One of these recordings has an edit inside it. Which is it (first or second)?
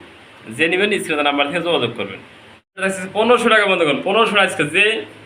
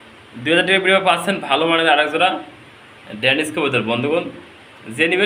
first